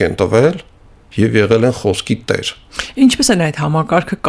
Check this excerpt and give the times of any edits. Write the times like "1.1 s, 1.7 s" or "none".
none